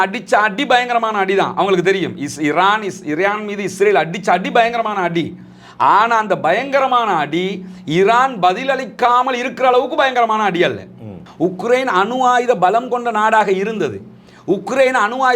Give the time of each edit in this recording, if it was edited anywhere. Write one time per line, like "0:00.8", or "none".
0:11.2